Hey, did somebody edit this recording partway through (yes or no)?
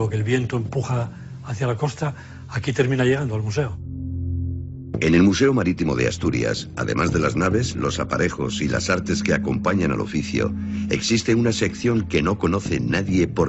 no